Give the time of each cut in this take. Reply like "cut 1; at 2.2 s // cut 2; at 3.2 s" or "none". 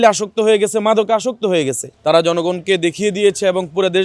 cut 1; at 1.9 s